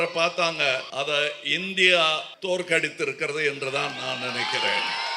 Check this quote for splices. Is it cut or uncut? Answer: cut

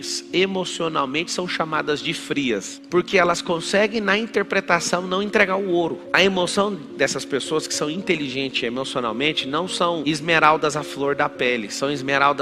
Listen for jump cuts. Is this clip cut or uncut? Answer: cut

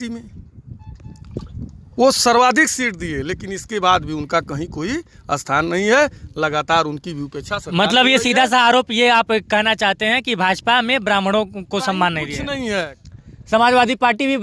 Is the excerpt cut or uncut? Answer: cut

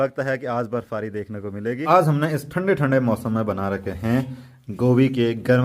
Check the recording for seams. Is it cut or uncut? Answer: cut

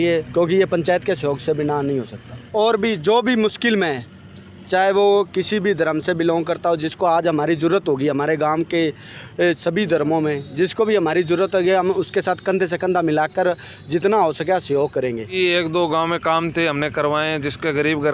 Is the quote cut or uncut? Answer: cut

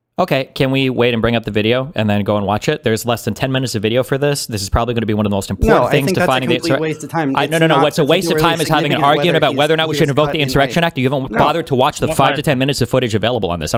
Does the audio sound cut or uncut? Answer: uncut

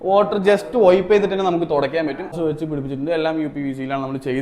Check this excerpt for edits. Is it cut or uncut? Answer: cut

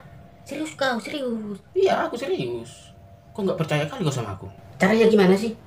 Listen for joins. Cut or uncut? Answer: cut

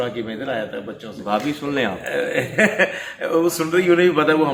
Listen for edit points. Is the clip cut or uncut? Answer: uncut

